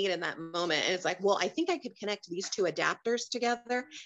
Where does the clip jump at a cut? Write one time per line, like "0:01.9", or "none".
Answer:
none